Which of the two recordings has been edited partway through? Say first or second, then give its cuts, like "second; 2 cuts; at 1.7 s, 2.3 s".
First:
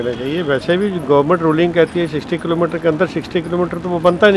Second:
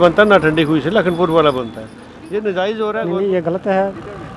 second; 1 cut; at 3.0 s